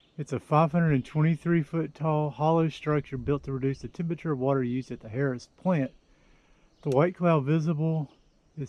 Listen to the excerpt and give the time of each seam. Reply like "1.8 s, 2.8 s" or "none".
none